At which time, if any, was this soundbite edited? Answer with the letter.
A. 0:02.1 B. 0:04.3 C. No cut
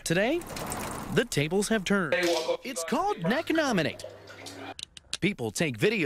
A